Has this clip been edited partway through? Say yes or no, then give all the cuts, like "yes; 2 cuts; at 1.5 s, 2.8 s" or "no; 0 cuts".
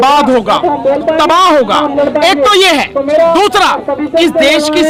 no; 0 cuts